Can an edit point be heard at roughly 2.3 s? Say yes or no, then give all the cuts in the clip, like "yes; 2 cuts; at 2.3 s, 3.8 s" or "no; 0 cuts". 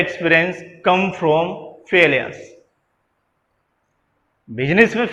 no; 0 cuts